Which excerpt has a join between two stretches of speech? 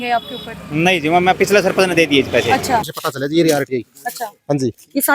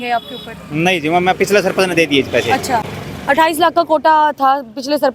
first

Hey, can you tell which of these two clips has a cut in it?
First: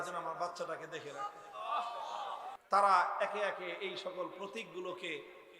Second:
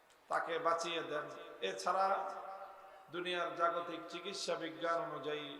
first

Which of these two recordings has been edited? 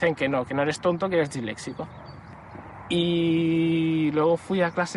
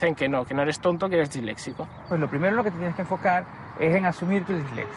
second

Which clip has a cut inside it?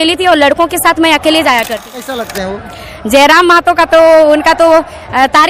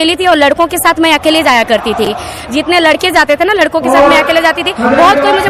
first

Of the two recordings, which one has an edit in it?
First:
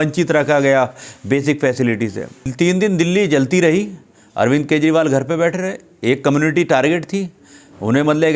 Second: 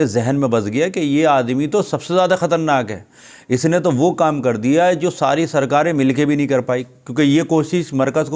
first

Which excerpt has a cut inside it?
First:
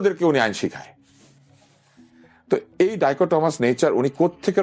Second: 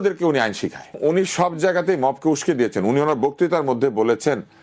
second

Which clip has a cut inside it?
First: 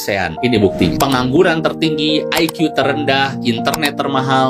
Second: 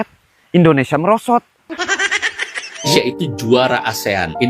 second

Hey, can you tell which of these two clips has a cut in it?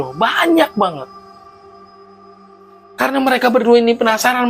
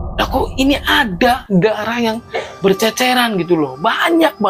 first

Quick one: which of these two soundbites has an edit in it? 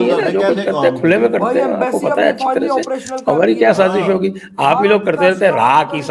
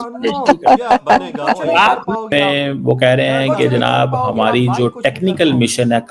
second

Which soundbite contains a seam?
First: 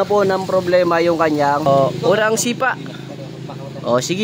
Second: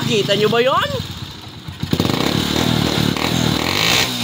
first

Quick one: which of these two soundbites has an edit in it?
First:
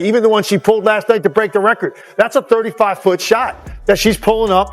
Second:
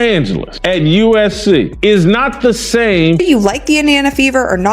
second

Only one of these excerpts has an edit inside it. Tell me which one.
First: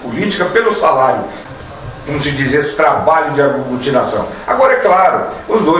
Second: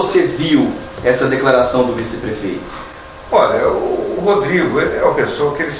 first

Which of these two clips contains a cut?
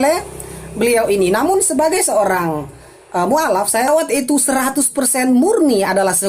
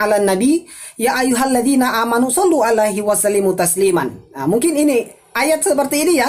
first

